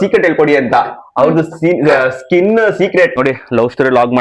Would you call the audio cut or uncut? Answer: cut